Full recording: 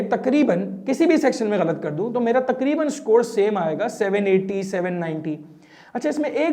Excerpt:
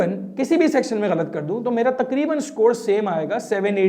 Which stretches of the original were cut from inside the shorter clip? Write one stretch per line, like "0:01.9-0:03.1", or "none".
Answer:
none